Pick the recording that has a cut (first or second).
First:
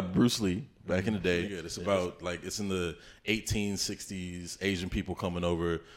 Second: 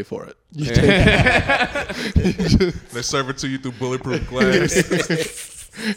first